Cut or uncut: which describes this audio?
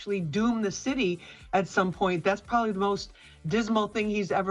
uncut